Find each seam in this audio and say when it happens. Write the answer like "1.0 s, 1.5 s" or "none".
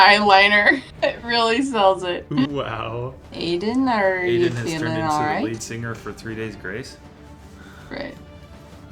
0.9 s, 3.3 s